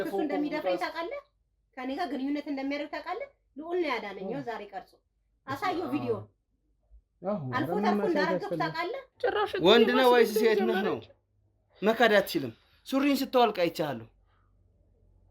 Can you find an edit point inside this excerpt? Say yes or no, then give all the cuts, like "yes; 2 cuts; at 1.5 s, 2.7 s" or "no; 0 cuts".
yes; 1 cut; at 9.0 s